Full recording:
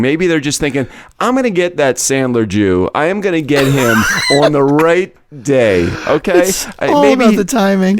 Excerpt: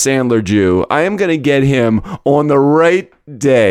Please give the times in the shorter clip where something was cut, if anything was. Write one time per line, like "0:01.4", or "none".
none